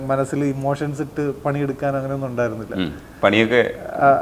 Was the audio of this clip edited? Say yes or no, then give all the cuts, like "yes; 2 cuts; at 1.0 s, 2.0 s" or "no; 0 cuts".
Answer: no; 0 cuts